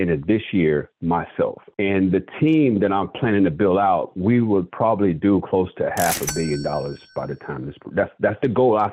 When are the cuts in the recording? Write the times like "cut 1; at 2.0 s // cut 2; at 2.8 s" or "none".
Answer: none